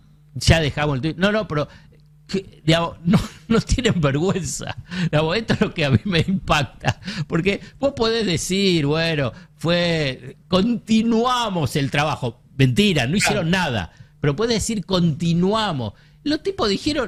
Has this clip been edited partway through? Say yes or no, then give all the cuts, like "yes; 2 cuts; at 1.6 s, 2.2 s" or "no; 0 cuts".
no; 0 cuts